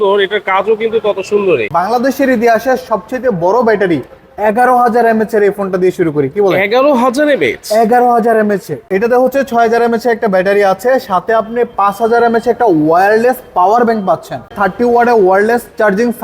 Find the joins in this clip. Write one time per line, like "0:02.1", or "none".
0:01.7
0:08.9
0:14.5